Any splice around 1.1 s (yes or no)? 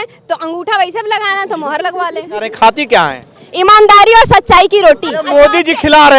no